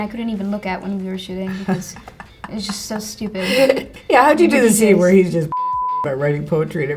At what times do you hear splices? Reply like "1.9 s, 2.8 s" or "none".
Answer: 3.8 s